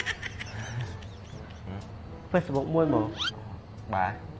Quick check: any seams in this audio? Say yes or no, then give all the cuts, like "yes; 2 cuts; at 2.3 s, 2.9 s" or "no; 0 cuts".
no; 0 cuts